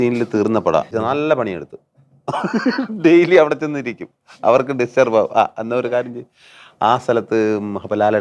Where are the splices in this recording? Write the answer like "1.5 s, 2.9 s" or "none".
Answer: 0.9 s